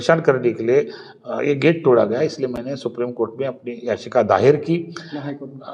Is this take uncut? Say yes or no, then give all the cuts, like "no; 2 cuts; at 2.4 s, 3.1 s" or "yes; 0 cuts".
yes; 0 cuts